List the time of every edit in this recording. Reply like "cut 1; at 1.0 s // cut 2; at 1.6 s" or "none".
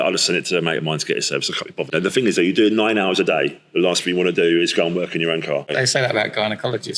cut 1; at 1.9 s // cut 2; at 5.7 s